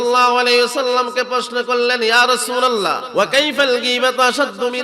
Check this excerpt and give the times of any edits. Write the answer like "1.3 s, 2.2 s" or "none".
3.0 s

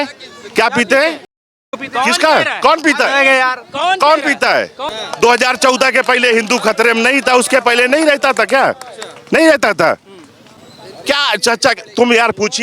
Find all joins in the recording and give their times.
4.8 s

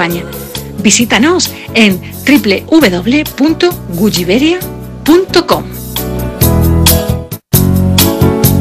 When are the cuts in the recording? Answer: 7.3 s

